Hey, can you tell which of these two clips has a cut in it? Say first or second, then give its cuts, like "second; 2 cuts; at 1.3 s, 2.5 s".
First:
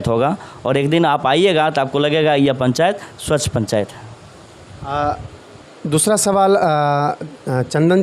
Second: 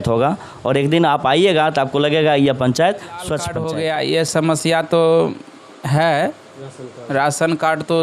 second; 1 cut; at 3.5 s